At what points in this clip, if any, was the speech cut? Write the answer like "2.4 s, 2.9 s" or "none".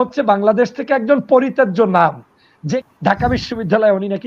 2.6 s